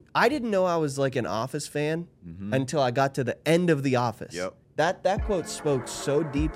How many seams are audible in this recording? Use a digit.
1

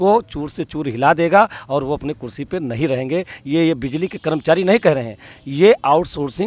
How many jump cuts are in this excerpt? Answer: 0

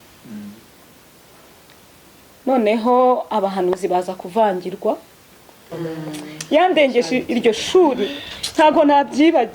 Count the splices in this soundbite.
1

